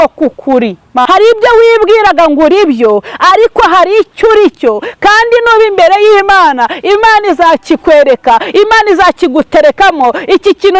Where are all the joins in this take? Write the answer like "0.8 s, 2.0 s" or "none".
1.0 s